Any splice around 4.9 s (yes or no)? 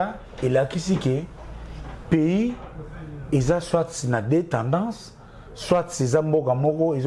no